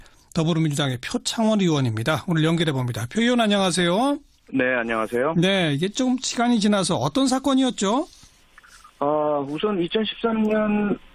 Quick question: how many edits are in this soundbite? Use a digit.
0